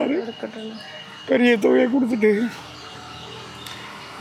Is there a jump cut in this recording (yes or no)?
no